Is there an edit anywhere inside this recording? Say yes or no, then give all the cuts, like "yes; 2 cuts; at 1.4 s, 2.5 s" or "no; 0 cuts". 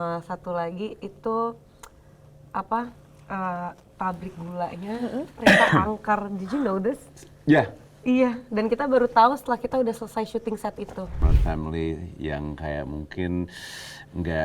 yes; 1 cut; at 11.2 s